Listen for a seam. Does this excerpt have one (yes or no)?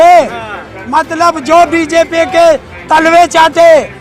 no